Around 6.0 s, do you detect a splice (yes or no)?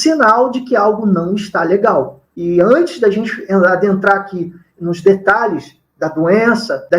no